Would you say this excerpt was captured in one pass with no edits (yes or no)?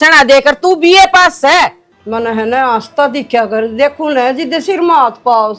no